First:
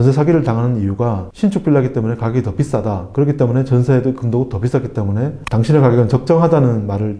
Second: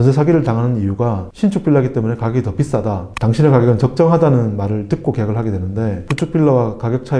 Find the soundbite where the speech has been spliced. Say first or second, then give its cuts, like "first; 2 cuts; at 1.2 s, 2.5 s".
second; 2 cuts; at 3.1 s, 6.1 s